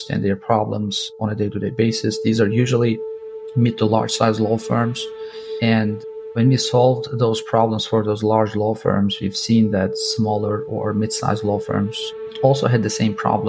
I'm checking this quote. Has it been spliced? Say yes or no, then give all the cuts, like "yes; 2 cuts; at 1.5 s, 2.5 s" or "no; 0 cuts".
no; 0 cuts